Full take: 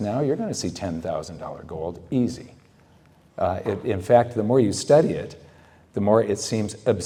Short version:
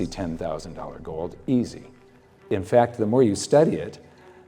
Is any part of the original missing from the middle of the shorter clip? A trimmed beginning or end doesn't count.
yes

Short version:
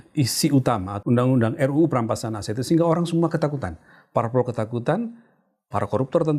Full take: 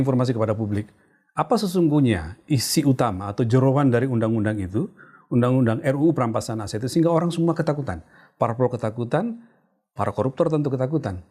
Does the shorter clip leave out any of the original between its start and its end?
yes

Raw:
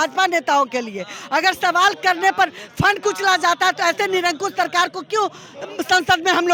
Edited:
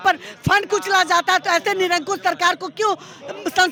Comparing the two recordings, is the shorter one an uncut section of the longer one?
yes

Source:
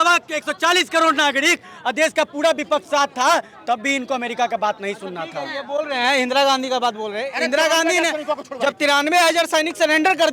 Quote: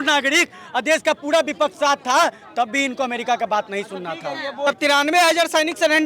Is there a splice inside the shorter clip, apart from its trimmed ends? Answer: yes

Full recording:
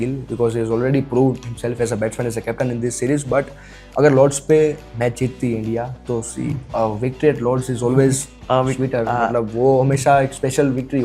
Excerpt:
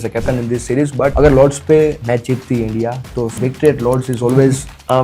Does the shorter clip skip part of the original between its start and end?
yes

